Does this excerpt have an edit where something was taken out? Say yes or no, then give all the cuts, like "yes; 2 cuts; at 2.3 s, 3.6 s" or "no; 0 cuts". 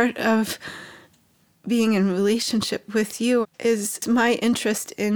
yes; 1 cut; at 3.6 s